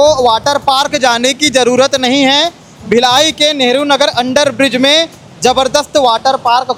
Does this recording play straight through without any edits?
yes; 0 cuts

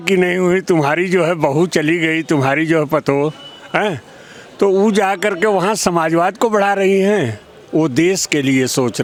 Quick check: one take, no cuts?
yes; 0 cuts

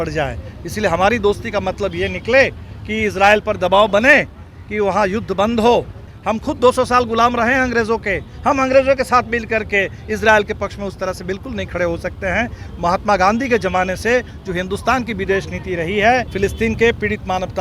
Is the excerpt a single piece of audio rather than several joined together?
no; 2 cuts; at 6.0 s, 16.3 s

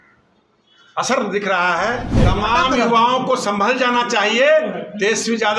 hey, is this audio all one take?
no; 1 cut; at 2.2 s

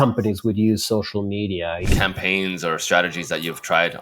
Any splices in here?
yes; 1 cut; at 1.9 s

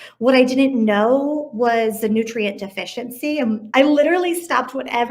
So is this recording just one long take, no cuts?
no; 1 cut; at 3.6 s

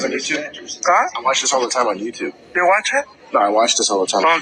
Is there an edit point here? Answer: no; 0 cuts

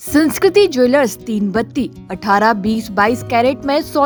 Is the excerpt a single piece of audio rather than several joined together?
yes; 0 cuts

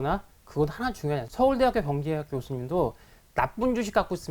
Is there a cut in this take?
yes; 1 cut; at 1.3 s

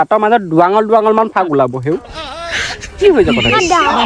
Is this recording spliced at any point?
no; 0 cuts

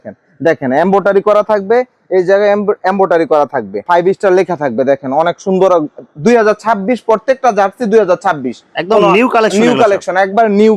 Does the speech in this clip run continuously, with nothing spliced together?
yes; 0 cuts

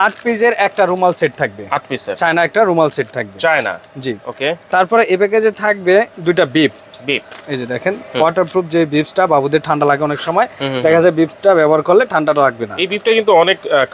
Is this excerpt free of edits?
yes; 0 cuts

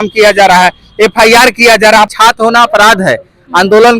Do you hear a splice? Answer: yes; 1 cut; at 2.1 s

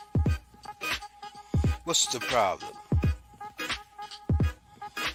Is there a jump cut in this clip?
no; 0 cuts

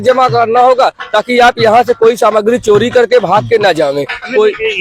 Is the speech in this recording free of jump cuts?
yes; 0 cuts

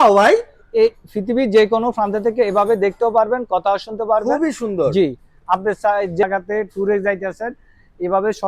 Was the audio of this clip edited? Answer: yes; 1 cut; at 6.2 s

